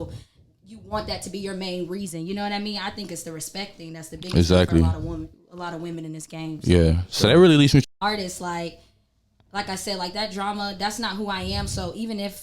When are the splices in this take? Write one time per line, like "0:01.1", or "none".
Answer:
0:07.9